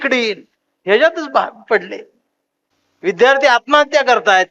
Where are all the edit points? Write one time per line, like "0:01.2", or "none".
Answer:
none